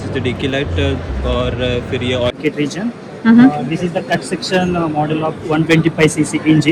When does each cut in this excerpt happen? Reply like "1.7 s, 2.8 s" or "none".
2.3 s